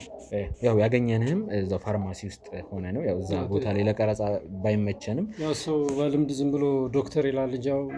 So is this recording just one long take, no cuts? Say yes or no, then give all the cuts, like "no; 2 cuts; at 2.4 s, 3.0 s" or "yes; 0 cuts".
yes; 0 cuts